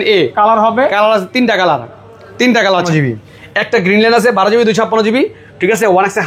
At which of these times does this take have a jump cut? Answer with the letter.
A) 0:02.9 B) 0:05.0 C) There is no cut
A